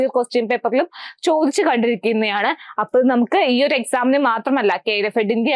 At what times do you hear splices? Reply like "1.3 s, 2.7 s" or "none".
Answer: none